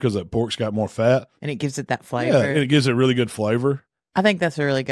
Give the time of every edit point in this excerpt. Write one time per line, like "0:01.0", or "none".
none